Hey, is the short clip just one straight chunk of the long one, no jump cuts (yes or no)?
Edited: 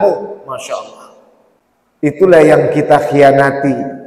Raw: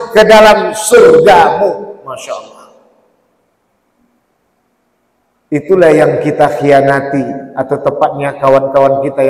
no